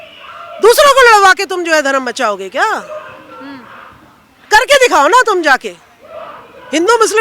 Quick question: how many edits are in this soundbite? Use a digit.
0